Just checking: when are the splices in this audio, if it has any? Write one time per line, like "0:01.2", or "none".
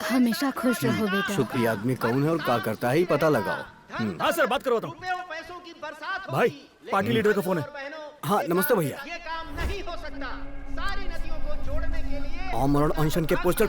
0:01.5
0:09.0
0:10.7